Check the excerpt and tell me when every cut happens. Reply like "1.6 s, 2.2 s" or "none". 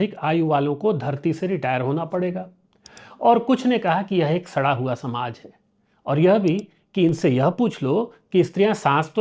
none